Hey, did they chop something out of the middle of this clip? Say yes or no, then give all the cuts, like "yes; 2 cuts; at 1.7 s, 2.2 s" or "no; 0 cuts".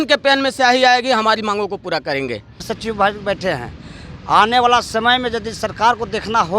yes; 1 cut; at 2.7 s